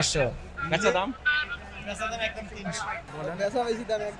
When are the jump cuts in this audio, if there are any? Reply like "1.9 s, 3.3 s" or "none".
3.0 s